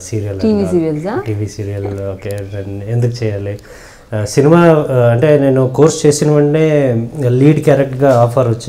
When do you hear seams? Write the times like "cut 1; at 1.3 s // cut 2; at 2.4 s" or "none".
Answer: none